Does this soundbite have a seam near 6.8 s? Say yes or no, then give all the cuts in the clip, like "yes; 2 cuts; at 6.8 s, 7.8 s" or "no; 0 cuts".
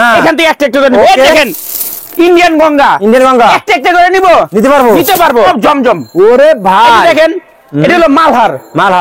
no; 1 cut; at 5.5 s